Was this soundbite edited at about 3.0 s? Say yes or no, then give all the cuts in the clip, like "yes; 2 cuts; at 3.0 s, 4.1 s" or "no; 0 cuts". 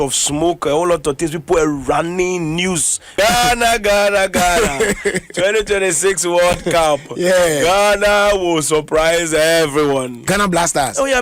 yes; 2 cuts; at 3.0 s, 10.2 s